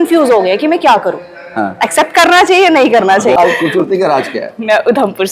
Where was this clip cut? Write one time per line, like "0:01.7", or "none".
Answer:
0:03.4